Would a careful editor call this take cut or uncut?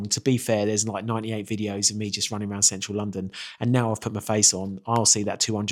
uncut